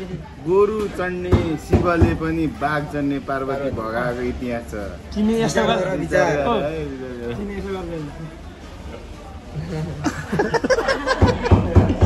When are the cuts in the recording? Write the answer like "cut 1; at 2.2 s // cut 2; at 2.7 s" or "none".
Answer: none